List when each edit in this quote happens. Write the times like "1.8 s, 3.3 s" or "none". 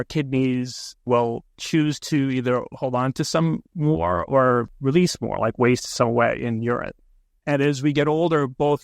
1.2 s, 4.7 s